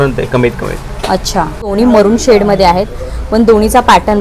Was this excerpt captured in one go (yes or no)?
no